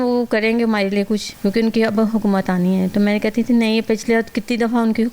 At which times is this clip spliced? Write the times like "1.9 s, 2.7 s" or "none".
1.3 s